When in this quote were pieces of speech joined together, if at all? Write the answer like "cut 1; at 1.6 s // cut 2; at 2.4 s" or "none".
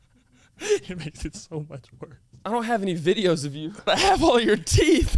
cut 1; at 2.4 s // cut 2; at 3.9 s